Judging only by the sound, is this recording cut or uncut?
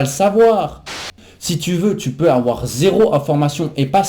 cut